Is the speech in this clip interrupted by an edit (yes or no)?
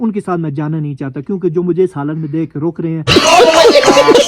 yes